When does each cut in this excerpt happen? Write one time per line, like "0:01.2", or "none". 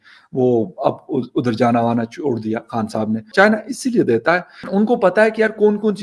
0:03.3
0:04.6